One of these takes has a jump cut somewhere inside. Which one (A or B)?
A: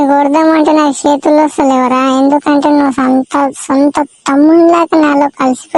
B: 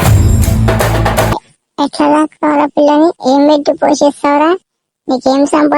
B